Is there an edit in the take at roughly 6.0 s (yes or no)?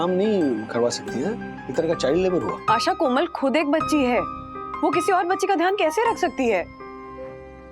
no